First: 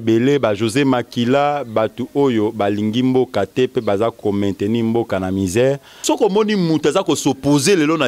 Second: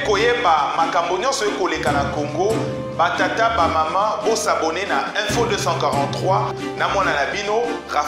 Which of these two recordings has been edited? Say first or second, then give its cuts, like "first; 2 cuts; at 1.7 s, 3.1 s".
first; 1 cut; at 6.0 s